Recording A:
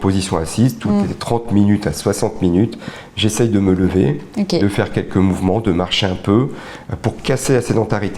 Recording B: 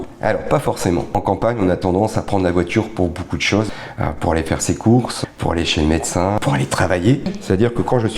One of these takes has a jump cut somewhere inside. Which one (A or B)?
B